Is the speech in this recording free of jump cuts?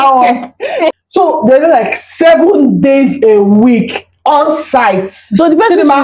no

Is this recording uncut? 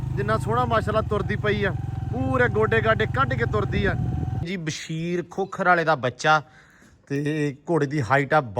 no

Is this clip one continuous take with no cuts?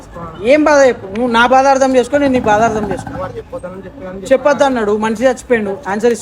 yes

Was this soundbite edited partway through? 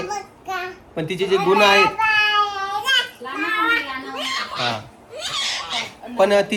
no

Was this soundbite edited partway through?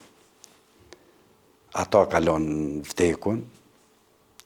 no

